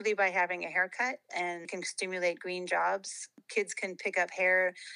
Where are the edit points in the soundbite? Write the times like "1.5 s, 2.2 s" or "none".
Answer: 1.8 s, 3.3 s

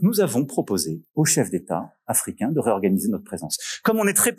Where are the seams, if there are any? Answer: 1.0 s

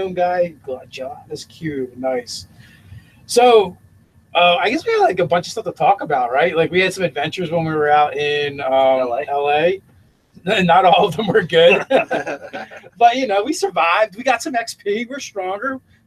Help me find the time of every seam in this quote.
3.0 s

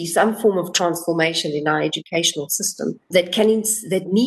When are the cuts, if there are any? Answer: 3.1 s

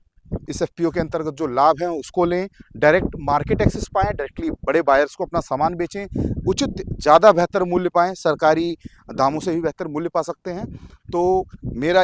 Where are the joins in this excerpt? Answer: none

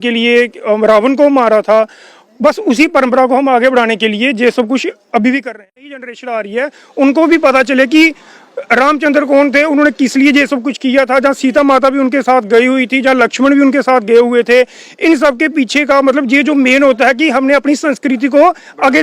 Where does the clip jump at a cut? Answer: 6.0 s

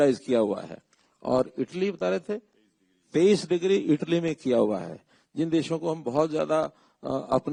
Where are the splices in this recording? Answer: none

